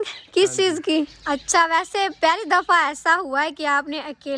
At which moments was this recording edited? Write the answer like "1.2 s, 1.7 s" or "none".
1.2 s